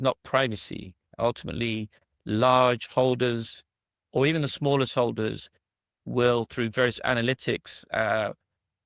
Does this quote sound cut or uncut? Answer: uncut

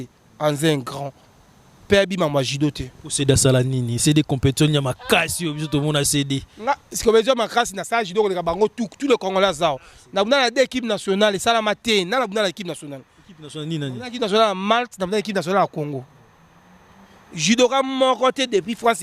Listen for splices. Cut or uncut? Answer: uncut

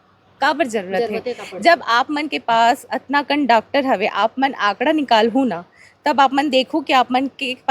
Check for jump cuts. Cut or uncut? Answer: uncut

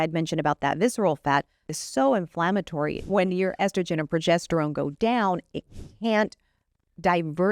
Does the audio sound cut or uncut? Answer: cut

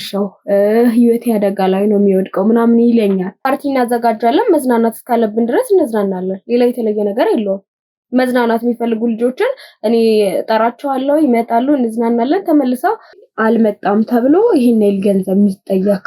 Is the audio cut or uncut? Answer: cut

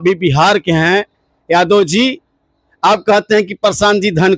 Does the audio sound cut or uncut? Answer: uncut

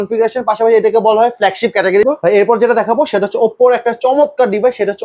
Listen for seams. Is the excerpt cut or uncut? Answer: cut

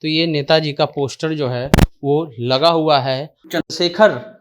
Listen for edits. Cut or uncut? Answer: cut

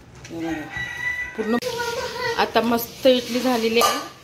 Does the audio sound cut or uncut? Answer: cut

